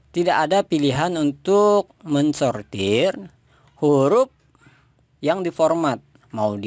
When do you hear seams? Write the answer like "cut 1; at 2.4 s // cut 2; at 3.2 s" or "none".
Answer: none

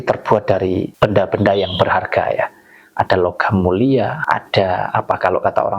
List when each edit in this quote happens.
cut 1; at 0.9 s // cut 2; at 4.2 s

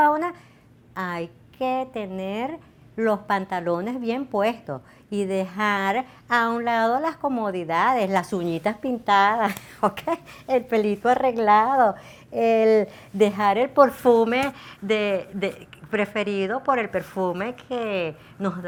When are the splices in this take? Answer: none

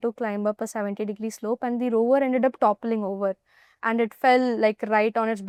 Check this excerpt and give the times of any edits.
none

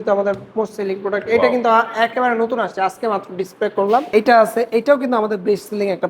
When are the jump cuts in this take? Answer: cut 1; at 4.1 s

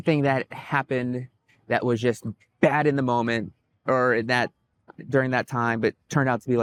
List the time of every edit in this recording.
none

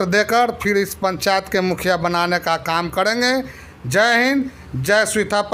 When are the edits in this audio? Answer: none

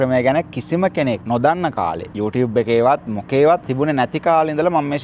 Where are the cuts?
cut 1; at 1.2 s // cut 2; at 2.1 s // cut 3; at 3.7 s

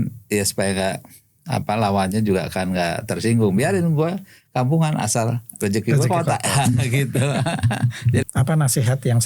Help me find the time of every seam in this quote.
cut 1; at 8.2 s

